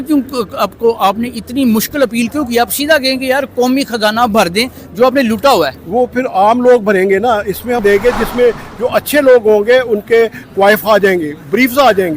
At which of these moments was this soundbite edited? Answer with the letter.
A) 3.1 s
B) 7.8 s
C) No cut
B